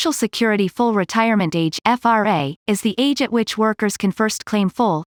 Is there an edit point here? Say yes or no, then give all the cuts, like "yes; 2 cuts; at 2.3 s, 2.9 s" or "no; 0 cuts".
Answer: no; 0 cuts